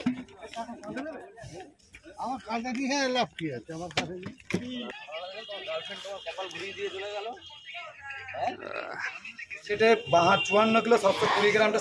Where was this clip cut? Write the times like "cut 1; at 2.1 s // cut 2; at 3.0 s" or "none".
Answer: cut 1; at 9.7 s